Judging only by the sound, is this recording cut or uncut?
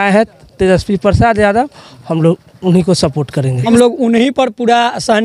cut